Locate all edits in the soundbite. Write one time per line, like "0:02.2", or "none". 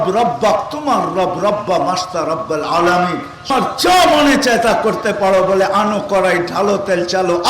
0:03.5